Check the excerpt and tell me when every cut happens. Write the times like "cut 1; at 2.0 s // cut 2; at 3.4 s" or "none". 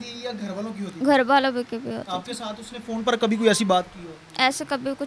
none